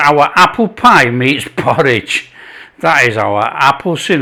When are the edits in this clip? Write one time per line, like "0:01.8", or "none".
none